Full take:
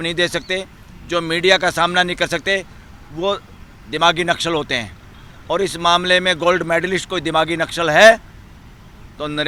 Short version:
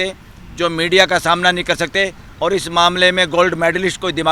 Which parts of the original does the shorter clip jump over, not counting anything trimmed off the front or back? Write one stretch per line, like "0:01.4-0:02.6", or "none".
0:02.7-0:05.3